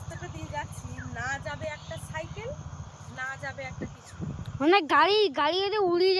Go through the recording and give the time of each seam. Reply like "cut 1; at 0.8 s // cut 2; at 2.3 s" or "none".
none